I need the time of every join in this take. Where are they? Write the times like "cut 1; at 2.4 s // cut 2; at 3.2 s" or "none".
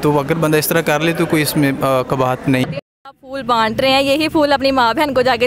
cut 1; at 2.7 s